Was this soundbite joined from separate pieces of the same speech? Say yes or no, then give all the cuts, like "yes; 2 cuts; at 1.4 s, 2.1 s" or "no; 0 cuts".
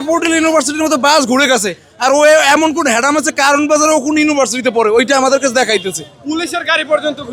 no; 0 cuts